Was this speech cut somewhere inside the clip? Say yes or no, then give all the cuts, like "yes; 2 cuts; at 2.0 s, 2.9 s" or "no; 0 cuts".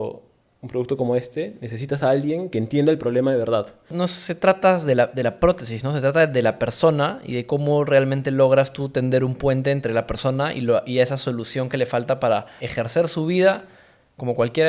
yes; 2 cuts; at 3.9 s, 12.6 s